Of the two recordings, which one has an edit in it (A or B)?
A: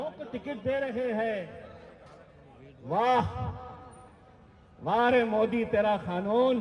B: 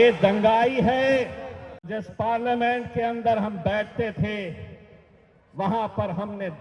B